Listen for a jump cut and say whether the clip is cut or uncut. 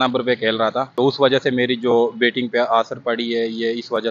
cut